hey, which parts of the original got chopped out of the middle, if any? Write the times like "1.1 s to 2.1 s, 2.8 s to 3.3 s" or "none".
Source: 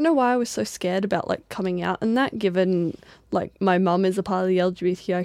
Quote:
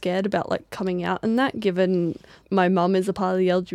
3.2 s to 3.5 s